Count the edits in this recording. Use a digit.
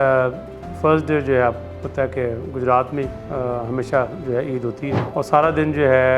1